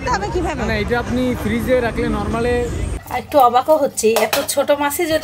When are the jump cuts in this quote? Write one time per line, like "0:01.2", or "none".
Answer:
0:02.9